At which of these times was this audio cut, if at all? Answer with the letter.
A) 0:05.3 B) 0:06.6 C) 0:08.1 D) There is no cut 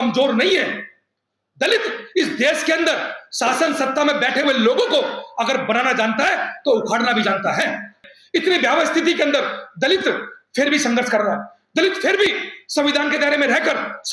C